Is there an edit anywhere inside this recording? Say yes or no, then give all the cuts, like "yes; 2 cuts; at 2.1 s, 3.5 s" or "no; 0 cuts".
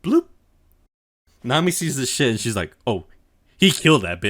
yes; 1 cut; at 1.3 s